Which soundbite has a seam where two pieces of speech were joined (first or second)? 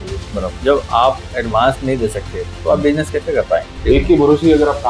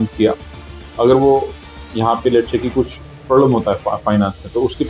first